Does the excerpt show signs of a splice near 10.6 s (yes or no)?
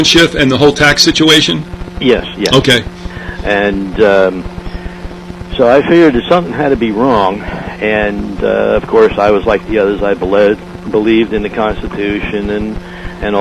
no